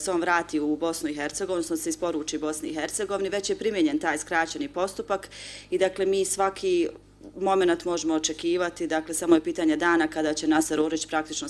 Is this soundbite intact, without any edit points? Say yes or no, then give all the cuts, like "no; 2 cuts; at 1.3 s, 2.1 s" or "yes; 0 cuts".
no; 1 cut; at 3.2 s